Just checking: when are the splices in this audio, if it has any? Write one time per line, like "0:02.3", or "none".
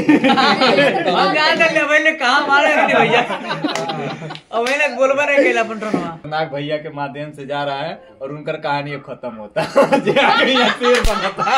0:06.2